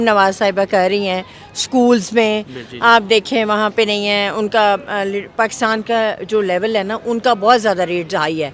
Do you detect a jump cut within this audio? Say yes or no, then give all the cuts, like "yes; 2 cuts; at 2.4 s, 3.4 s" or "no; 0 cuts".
no; 0 cuts